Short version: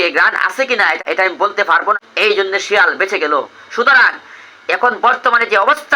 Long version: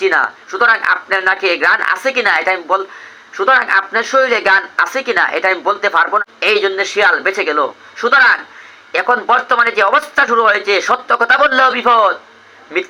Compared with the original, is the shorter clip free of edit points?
no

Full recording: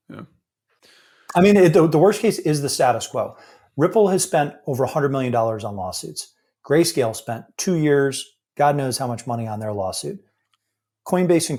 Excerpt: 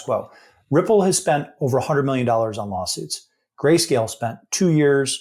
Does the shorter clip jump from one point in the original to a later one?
no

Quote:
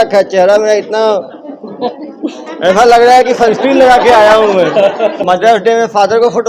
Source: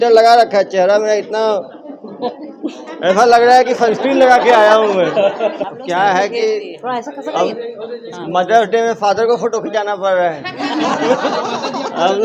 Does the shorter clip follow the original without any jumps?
no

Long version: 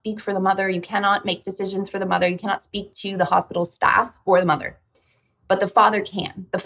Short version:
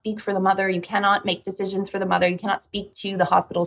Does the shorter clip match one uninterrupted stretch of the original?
yes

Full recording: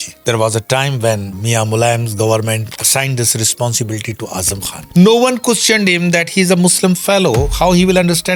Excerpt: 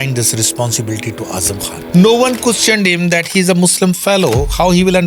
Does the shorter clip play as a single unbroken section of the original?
yes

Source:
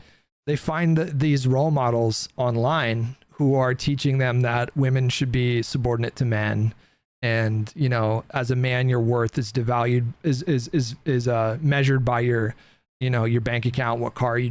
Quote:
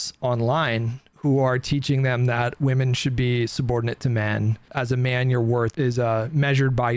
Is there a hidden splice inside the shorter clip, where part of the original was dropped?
yes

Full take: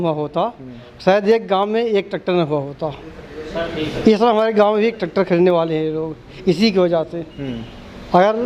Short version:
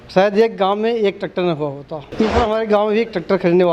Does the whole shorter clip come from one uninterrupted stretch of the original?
no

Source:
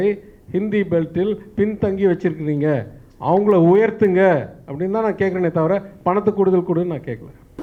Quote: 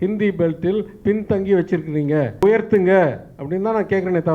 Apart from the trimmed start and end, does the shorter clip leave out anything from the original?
yes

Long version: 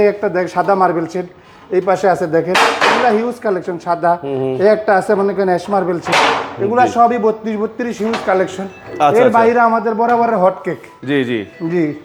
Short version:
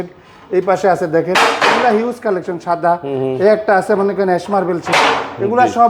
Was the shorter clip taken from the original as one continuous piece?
yes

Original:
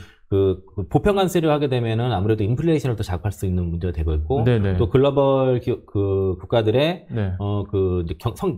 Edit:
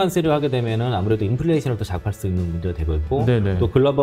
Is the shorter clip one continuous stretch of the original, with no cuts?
yes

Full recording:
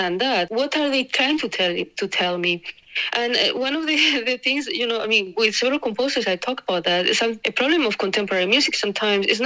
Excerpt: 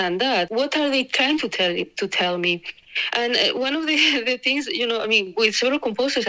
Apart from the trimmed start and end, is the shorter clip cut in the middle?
no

